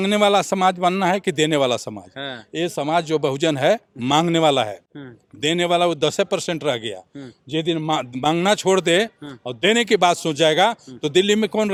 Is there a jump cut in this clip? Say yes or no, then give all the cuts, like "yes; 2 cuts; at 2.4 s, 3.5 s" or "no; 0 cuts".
no; 0 cuts